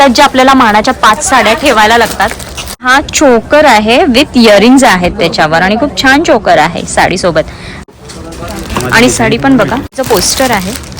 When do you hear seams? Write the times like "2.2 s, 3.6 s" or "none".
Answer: 2.9 s, 7.8 s, 10.0 s